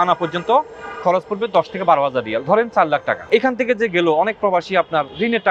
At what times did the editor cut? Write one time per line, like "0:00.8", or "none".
0:03.2